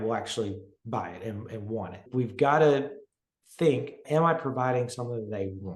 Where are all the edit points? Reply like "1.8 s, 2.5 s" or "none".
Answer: 2.1 s, 4.0 s